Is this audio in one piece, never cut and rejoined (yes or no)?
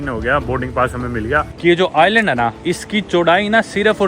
no